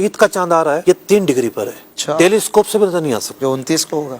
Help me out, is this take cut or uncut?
cut